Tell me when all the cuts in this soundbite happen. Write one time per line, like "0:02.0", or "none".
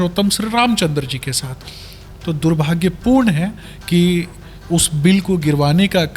none